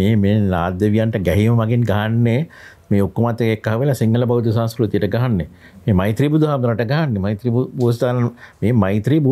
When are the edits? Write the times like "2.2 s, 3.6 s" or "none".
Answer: none

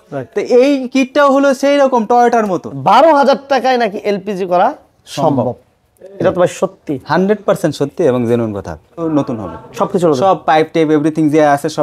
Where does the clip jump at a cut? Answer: 2.7 s, 9.0 s

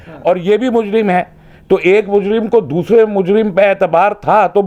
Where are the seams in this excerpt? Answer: none

